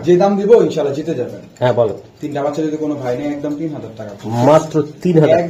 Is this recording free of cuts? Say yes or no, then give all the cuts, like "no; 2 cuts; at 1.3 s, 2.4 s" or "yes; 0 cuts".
yes; 0 cuts